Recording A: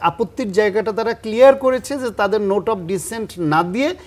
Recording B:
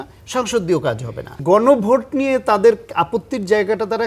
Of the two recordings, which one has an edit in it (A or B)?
B